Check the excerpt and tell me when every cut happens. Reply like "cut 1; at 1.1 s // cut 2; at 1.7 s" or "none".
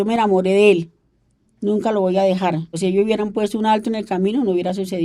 cut 1; at 2.8 s